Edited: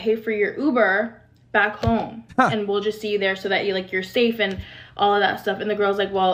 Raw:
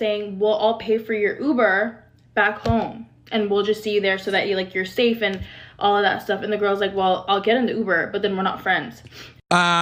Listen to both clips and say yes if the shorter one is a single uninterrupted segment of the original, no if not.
yes